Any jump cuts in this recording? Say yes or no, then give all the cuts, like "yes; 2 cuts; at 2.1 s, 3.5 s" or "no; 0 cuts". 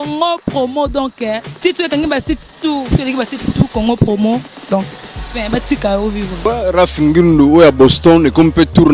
no; 0 cuts